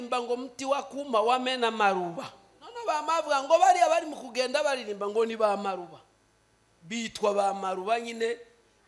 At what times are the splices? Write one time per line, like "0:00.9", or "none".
0:02.8